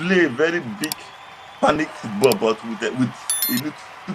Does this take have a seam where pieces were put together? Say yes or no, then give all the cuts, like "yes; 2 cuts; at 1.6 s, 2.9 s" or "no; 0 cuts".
no; 0 cuts